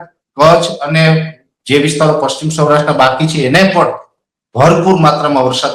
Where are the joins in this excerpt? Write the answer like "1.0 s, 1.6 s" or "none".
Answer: none